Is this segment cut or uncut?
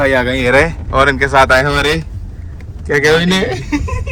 uncut